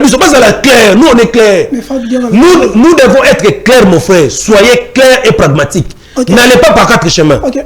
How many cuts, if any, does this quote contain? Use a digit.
0